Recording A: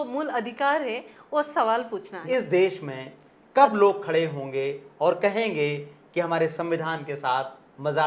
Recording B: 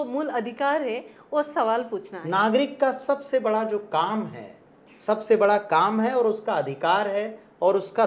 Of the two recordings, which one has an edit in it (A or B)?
A